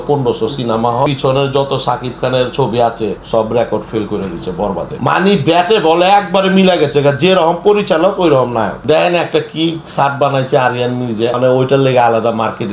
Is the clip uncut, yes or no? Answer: no